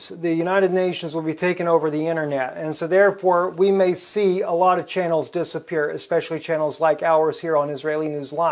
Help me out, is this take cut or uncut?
uncut